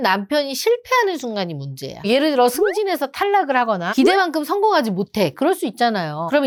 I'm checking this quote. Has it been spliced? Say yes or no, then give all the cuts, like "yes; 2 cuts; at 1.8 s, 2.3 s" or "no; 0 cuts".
no; 0 cuts